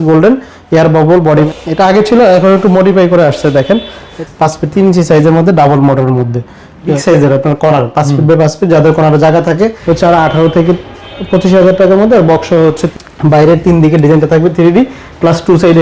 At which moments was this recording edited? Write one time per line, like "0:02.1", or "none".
0:01.5
0:04.1
0:07.0
0:09.8
0:12.8